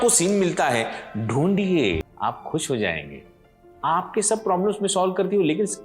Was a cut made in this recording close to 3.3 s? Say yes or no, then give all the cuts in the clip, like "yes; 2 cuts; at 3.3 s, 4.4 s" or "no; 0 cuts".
no; 1 cut; at 2.1 s